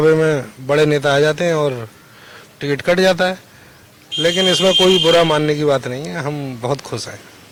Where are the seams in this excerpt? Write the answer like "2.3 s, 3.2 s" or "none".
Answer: none